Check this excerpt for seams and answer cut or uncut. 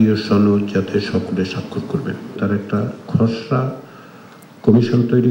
cut